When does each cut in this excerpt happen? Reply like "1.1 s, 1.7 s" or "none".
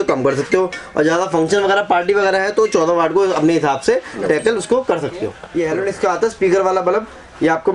5.4 s